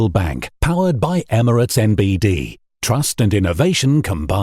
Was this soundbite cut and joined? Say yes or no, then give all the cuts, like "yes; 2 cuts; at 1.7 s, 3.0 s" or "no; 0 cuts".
no; 0 cuts